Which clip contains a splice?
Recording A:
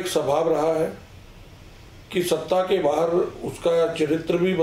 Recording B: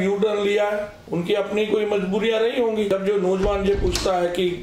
B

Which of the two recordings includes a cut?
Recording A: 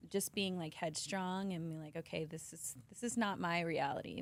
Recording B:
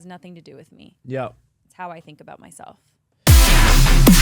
B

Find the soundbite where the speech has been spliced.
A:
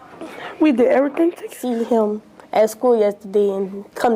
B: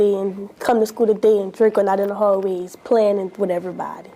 A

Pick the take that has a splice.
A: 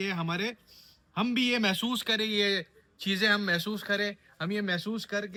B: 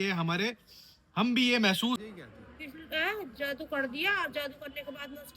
B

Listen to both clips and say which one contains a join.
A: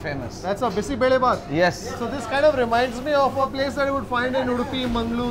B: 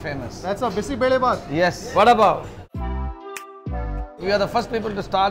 B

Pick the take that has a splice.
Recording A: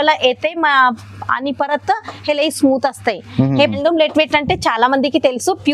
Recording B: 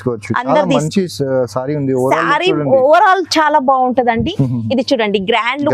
A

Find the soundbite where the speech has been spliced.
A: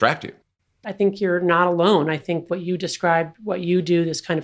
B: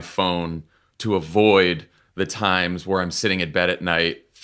A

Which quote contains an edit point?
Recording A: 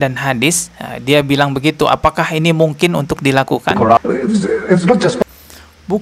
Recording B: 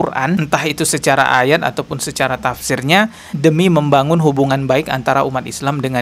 A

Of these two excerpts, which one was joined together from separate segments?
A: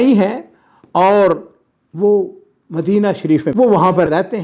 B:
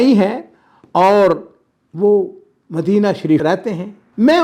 B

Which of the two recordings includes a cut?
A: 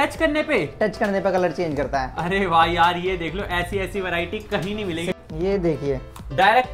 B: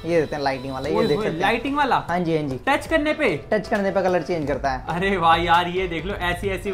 A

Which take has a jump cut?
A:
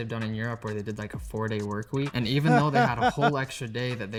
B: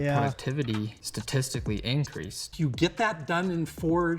B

